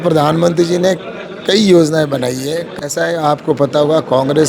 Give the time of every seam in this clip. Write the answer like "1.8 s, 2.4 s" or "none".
2.7 s